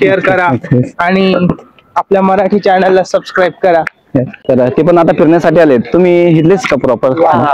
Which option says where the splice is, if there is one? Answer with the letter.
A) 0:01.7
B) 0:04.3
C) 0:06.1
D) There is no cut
B